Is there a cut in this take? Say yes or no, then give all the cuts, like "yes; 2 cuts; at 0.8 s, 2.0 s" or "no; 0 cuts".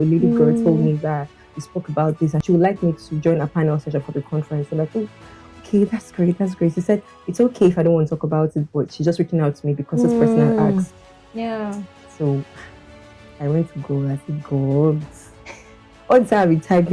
yes; 1 cut; at 2.4 s